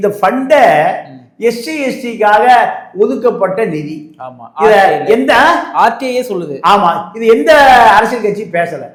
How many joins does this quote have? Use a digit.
0